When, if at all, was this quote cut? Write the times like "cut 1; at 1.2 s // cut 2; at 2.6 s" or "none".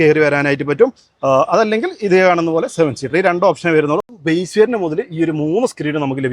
cut 1; at 4.1 s